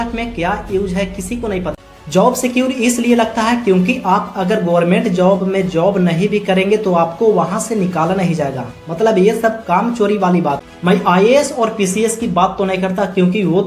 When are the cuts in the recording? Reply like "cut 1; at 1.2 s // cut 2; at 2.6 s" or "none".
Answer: cut 1; at 1.8 s // cut 2; at 10.7 s